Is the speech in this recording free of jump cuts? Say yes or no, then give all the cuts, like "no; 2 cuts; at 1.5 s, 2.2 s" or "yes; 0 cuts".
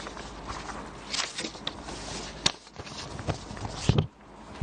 no; 1 cut; at 3.3 s